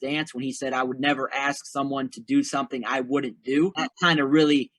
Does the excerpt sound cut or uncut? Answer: cut